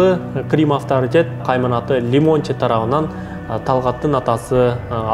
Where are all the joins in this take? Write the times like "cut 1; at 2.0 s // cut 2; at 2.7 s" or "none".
cut 1; at 1.4 s